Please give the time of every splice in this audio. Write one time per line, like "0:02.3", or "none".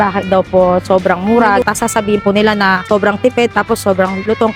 0:01.6